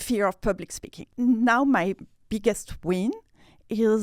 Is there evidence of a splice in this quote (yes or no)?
yes